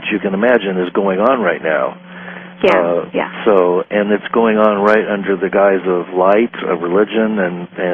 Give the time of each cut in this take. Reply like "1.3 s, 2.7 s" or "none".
5.0 s